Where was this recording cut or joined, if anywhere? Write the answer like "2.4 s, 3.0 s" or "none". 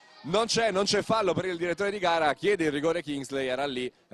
none